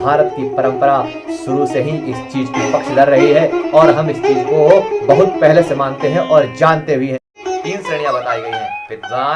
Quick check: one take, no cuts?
no; 1 cut; at 7.4 s

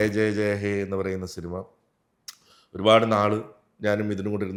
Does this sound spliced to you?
no; 0 cuts

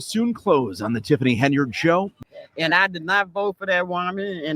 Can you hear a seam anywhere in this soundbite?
yes; 1 cut; at 2.2 s

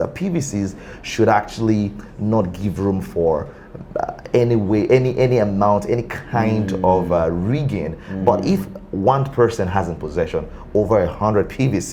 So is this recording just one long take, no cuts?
yes; 0 cuts

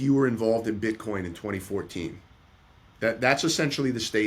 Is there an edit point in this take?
no; 0 cuts

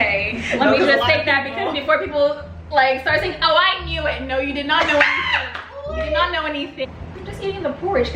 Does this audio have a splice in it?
yes; 1 cut; at 6.9 s

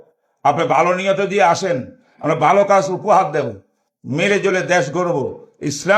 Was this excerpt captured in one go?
yes; 0 cuts

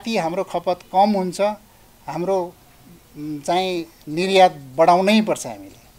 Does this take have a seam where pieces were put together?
no; 0 cuts

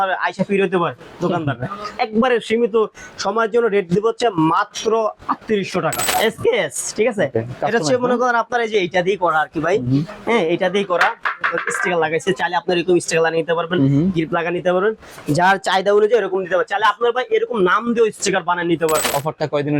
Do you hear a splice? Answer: yes; 2 cuts; at 6.0 s, 19.1 s

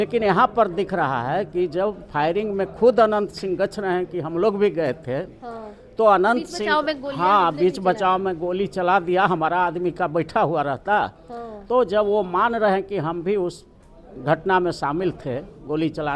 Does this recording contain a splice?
no; 0 cuts

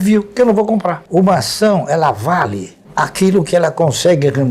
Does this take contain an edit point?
yes; 1 cut; at 1.0 s

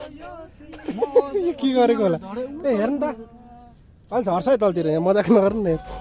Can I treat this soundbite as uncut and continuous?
yes; 0 cuts

